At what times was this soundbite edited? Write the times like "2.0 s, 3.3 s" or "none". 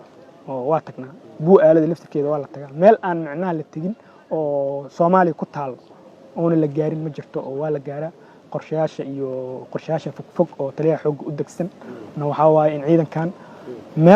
none